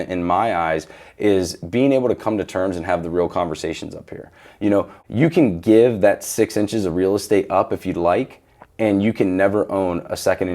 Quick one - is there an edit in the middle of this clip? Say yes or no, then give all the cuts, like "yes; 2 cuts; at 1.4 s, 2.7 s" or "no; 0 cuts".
yes; 1 cut; at 5.0 s